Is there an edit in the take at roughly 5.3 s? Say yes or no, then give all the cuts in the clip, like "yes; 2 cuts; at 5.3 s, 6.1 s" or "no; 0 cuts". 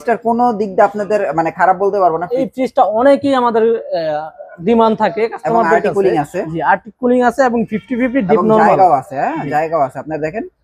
no; 1 cut; at 2.4 s